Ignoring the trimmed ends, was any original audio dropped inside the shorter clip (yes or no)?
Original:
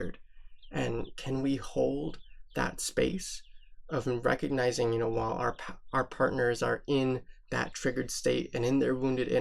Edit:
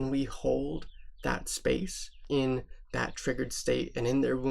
yes